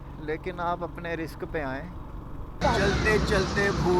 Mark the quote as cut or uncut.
cut